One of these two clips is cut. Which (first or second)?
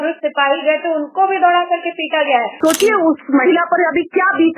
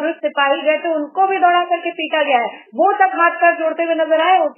first